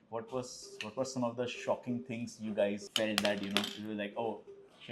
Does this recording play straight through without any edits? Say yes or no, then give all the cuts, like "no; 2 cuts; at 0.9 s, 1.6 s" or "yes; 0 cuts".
yes; 0 cuts